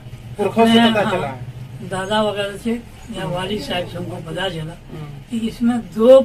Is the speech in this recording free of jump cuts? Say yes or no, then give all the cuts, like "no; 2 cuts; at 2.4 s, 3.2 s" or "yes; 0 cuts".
yes; 0 cuts